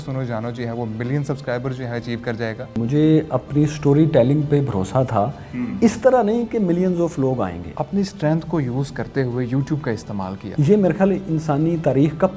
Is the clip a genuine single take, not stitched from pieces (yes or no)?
no